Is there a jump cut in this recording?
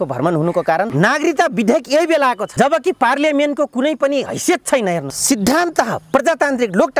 yes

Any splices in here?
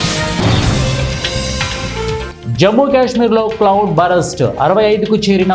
yes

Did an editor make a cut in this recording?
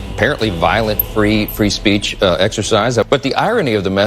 yes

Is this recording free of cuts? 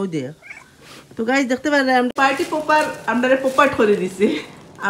no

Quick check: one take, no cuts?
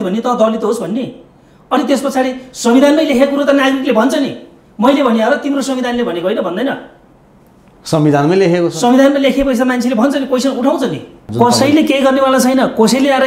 no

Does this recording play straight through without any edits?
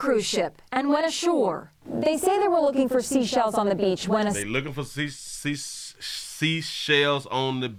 yes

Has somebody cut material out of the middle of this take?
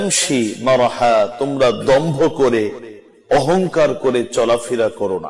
no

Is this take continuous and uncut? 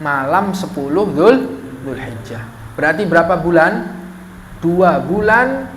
yes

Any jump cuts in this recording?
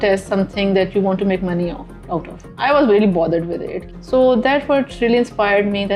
yes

